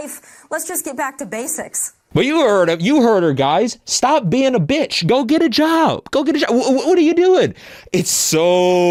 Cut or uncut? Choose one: uncut